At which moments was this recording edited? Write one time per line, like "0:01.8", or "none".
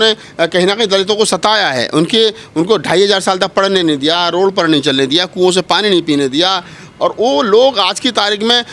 none